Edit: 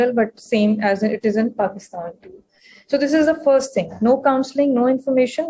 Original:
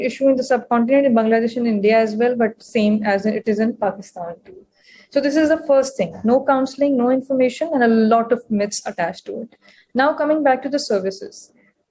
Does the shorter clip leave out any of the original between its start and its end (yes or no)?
no